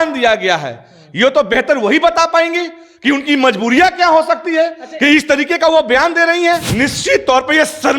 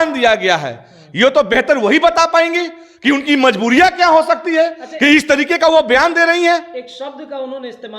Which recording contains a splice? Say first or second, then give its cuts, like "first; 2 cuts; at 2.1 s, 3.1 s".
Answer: first; 1 cut; at 6.7 s